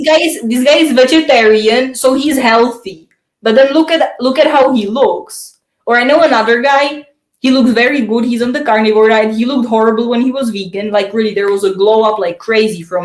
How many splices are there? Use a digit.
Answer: 0